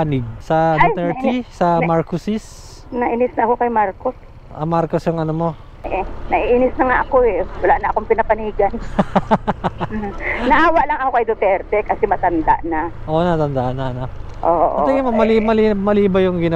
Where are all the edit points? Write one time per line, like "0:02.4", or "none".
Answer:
0:05.7